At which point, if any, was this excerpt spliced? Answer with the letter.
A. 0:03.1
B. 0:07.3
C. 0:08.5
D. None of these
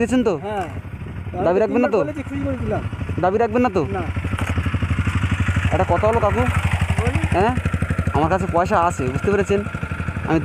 D